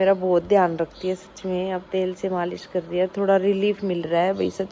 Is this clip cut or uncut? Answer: uncut